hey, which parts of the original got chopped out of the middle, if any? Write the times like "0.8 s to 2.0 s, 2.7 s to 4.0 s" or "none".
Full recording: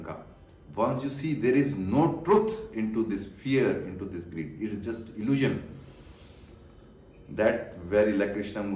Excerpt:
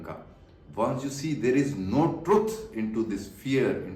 none